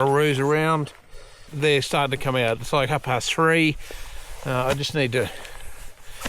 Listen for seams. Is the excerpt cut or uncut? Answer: cut